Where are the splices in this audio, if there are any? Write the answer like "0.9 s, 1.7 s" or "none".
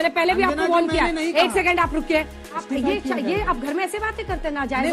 2.6 s